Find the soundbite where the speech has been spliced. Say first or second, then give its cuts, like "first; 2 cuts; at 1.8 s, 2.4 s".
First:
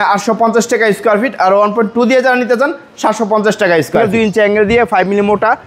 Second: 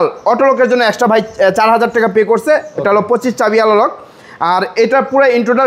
first; 1 cut; at 4.0 s